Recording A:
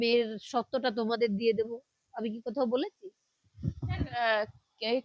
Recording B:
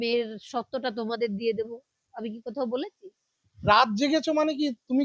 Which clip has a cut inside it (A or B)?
B